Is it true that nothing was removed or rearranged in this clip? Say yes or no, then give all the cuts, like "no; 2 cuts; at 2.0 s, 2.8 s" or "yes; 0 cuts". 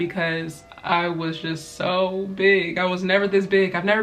yes; 0 cuts